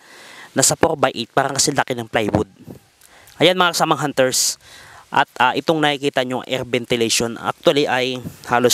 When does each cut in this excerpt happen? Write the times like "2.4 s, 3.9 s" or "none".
none